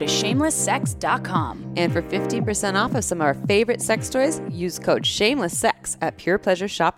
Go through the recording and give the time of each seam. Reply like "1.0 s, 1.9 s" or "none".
none

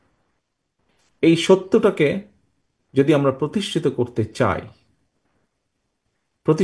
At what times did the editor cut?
none

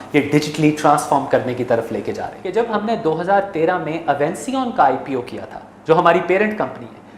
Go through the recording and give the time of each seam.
2.3 s

